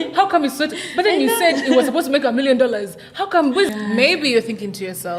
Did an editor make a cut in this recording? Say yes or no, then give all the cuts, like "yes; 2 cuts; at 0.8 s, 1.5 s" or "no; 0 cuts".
yes; 1 cut; at 3.7 s